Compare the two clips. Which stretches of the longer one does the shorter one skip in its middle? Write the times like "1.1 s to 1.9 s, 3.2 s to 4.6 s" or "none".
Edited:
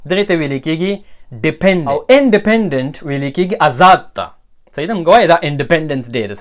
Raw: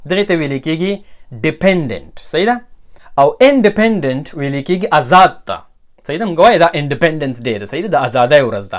2.0 s to 3.3 s

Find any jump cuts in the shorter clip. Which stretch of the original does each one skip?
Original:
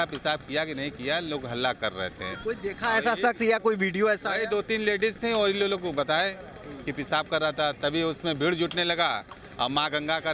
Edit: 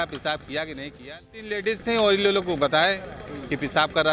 1.5 s to 4.9 s

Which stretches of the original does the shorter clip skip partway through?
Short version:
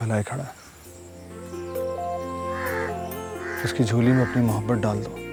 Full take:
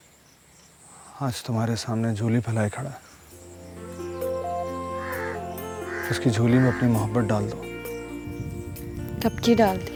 none

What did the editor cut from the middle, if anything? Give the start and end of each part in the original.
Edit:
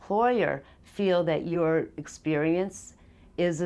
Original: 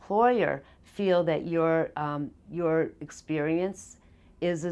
1.5 s to 2.5 s

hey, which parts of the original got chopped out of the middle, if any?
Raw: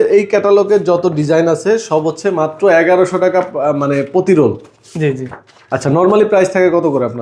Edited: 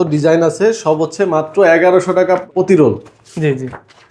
3.5 s to 4.1 s

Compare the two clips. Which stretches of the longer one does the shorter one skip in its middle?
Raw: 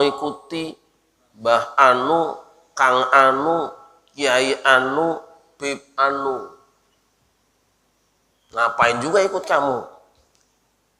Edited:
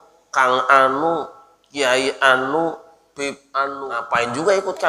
6.3 s to 8.6 s

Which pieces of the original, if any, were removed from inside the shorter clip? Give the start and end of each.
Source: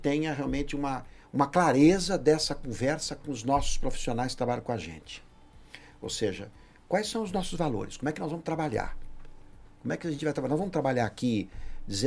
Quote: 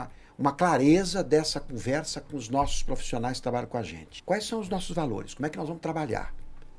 5.0 s to 6.7 s

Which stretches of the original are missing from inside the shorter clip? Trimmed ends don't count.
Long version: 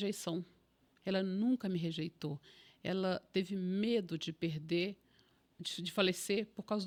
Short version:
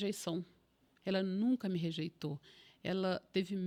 none

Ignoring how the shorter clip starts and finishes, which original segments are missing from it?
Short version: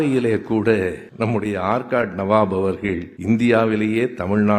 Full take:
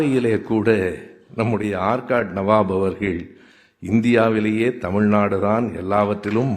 1.0 s to 1.2 s, 3.3 s to 3.7 s

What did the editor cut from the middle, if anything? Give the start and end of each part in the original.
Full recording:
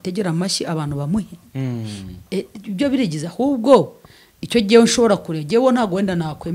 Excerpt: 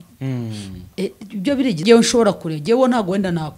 3.2 s to 4.7 s

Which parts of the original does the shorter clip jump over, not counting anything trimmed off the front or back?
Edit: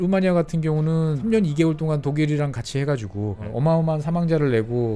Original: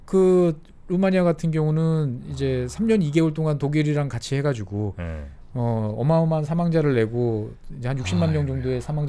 2.1 s to 2.7 s, 5.0 s to 5.9 s

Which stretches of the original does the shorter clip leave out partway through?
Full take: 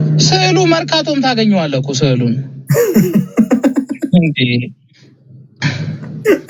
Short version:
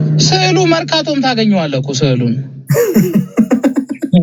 none

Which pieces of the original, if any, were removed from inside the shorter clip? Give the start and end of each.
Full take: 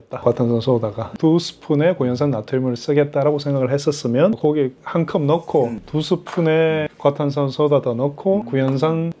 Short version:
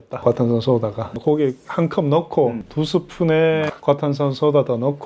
1.2 s to 4.4 s

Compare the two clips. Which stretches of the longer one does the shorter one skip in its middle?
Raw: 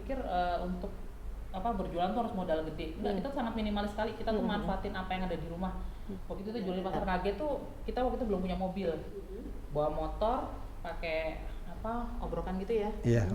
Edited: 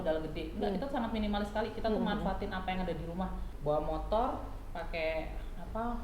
5.9 s to 9.6 s

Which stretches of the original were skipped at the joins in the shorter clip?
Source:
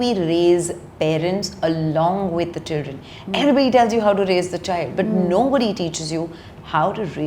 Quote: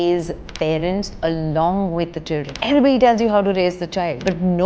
2.9 s to 3.2 s

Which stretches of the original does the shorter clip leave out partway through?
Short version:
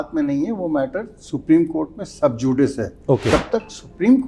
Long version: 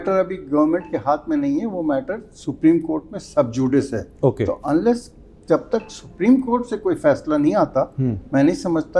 4.5 s to 5.5 s

